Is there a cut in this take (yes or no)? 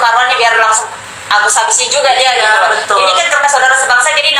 no